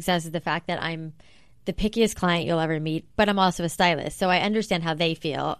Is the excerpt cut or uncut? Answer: uncut